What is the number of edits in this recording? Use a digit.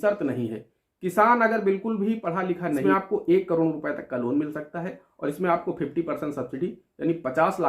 1